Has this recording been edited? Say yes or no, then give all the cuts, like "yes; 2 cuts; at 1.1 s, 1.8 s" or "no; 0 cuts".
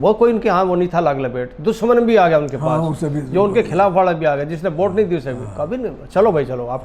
no; 0 cuts